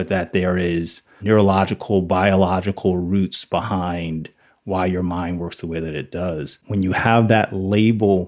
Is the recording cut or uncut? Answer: cut